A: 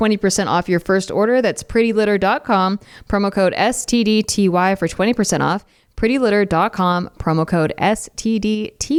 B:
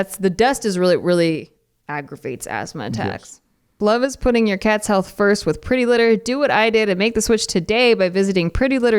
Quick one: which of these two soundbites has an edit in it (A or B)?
B